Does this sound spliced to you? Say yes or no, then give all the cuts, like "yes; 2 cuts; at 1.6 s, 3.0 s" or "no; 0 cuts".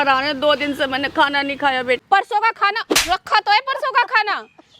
yes; 1 cut; at 2.0 s